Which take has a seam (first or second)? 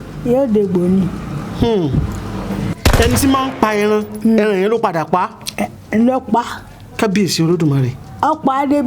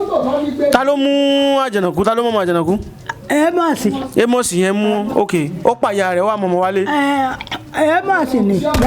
first